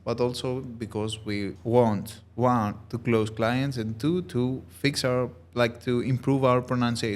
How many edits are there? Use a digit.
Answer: 1